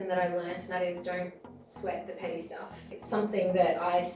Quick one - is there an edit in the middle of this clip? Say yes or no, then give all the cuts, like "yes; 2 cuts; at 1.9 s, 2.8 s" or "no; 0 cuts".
yes; 2 cuts; at 0.7 s, 2.9 s